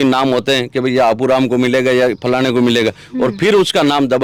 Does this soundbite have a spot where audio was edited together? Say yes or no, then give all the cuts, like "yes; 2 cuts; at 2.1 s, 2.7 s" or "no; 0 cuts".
no; 0 cuts